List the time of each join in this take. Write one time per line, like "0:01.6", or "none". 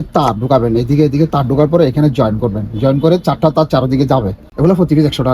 0:04.4